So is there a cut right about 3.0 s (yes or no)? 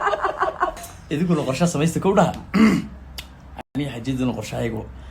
no